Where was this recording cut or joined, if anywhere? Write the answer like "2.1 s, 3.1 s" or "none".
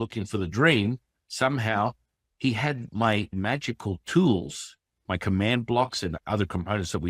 3.3 s, 6.2 s